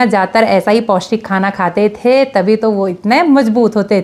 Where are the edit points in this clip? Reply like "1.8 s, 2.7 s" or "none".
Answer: none